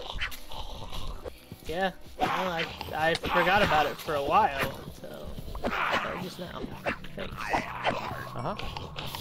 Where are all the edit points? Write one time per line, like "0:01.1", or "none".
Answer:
0:01.3